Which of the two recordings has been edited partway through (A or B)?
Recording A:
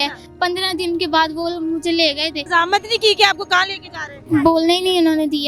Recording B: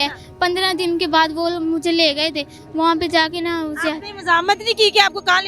A